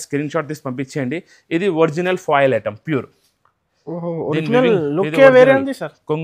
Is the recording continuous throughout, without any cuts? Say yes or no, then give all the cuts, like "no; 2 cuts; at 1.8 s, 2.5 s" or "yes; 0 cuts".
yes; 0 cuts